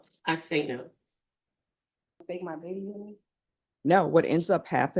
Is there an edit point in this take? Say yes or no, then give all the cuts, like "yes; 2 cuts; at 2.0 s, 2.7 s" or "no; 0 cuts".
yes; 1 cut; at 2.2 s